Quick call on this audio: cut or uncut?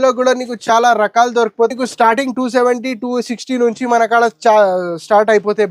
cut